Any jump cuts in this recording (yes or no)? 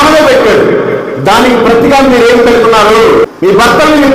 yes